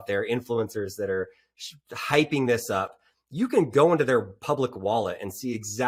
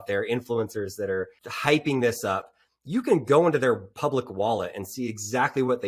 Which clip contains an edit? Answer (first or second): second